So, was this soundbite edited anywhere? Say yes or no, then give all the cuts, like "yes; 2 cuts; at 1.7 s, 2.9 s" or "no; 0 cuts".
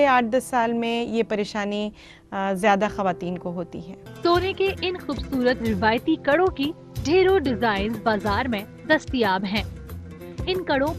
yes; 1 cut; at 4.1 s